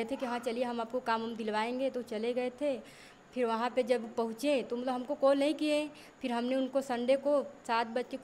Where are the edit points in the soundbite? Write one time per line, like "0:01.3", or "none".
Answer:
none